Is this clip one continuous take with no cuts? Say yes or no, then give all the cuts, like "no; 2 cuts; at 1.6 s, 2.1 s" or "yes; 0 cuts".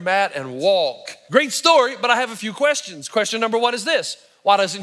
no; 1 cut; at 1.1 s